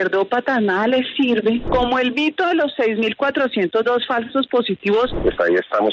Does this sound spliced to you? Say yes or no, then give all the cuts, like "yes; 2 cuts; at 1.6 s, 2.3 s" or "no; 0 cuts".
yes; 2 cuts; at 1.6 s, 5.2 s